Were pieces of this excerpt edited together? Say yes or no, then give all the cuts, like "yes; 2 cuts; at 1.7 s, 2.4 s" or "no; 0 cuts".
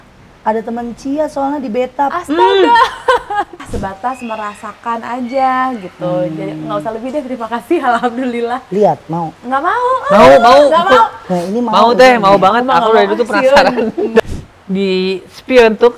yes; 2 cuts; at 3.7 s, 14.2 s